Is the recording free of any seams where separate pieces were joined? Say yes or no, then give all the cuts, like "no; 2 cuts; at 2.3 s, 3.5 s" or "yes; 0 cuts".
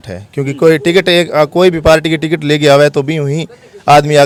yes; 0 cuts